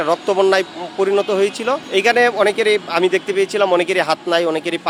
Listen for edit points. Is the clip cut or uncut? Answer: uncut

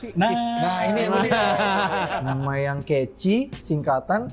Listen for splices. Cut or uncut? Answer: cut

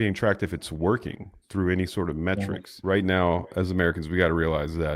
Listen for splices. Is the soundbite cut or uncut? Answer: cut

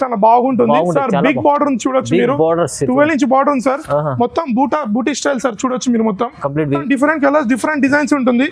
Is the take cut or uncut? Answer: cut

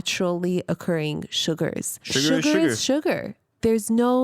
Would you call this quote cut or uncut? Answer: cut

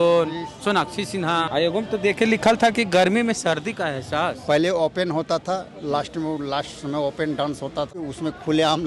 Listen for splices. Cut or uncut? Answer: cut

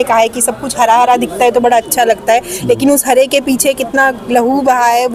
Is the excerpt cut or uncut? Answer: uncut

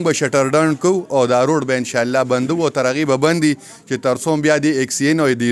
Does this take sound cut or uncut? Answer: uncut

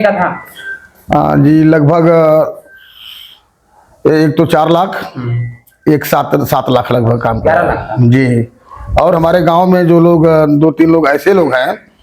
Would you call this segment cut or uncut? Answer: uncut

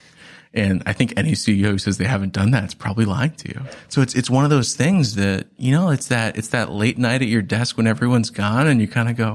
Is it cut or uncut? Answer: cut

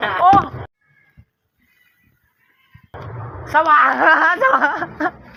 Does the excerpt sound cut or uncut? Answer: uncut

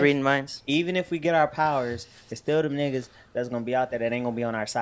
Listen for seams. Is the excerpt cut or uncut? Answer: uncut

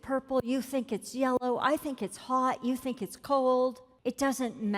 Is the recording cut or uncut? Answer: cut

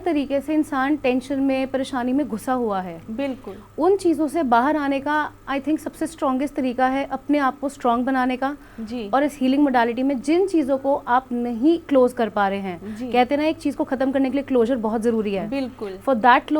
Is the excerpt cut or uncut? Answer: uncut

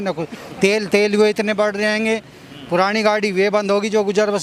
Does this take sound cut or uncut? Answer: uncut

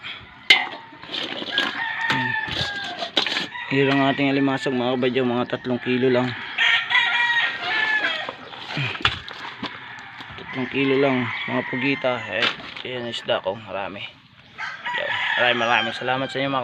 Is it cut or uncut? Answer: uncut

